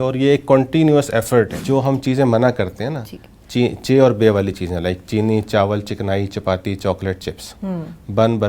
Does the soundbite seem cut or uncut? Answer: cut